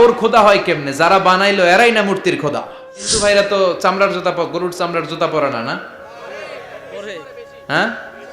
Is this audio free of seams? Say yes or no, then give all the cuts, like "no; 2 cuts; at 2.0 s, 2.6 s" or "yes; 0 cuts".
no; 1 cut; at 3.1 s